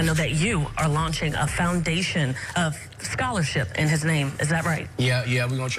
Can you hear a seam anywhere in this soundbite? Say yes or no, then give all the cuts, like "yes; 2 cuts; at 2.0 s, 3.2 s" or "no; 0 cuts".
no; 0 cuts